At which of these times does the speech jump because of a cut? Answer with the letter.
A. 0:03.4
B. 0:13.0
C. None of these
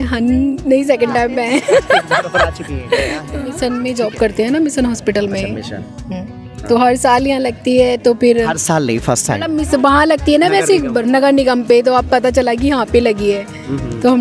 A